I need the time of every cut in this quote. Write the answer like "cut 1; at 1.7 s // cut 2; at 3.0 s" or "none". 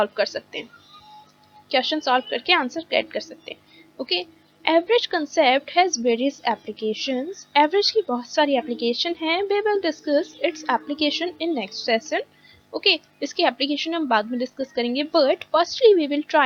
none